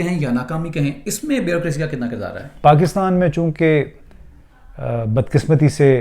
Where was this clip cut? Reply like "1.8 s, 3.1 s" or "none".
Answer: 2.4 s